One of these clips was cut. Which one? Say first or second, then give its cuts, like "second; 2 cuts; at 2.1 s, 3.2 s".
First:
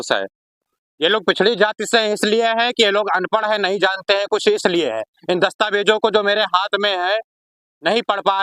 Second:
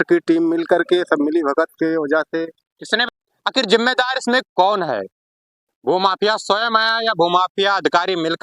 second; 1 cut; at 3.0 s